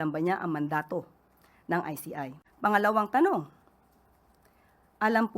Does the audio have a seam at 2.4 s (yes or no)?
yes